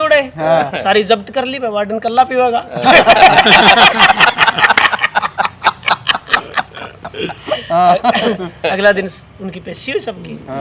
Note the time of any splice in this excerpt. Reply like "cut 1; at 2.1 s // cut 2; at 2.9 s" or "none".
none